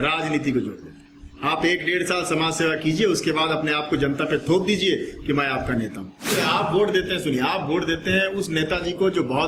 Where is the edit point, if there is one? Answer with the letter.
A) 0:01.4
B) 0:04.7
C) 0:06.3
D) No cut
C